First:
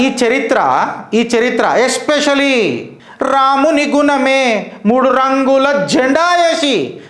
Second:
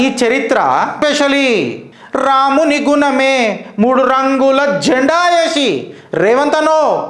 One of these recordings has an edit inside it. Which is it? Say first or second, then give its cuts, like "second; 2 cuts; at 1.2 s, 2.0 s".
second; 1 cut; at 0.9 s